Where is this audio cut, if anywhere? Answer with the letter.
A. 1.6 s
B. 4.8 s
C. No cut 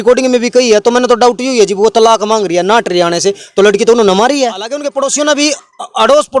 B